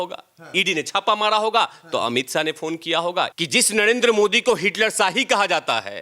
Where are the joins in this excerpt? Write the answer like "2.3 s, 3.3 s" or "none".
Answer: 3.3 s